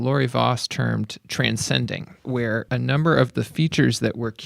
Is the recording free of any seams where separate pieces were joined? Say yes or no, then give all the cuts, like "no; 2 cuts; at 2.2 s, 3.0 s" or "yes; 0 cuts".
no; 2 cuts; at 1.2 s, 2.5 s